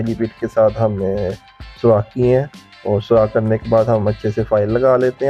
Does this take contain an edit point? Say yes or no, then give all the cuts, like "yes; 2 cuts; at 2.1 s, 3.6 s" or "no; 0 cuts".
no; 0 cuts